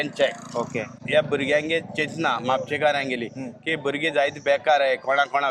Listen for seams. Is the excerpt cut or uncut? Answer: cut